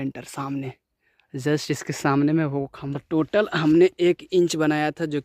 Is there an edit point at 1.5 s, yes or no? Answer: no